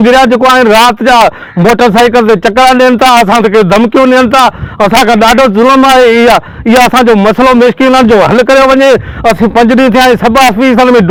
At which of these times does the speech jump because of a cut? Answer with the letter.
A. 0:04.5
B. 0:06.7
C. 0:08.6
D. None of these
D